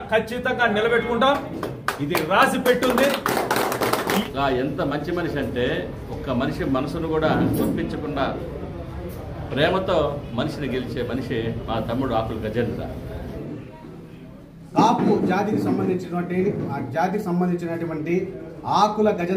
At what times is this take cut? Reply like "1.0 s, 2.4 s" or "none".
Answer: 4.2 s, 13.4 s